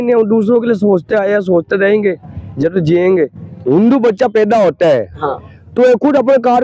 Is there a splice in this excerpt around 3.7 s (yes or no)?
yes